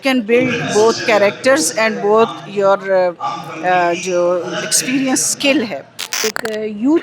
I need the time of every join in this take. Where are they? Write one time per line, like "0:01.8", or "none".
0:06.1